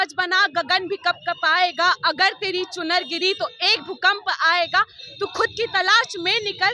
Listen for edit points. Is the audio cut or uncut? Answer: uncut